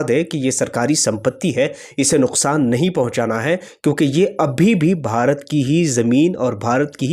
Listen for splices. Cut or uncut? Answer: uncut